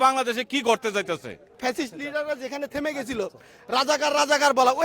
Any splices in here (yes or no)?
yes